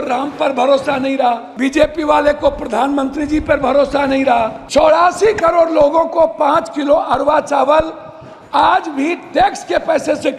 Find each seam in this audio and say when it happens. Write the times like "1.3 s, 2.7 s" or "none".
1.5 s, 4.6 s